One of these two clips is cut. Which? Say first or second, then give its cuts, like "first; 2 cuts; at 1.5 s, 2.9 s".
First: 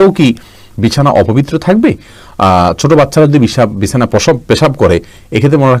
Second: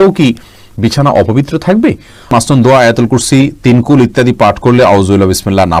second; 1 cut; at 2.3 s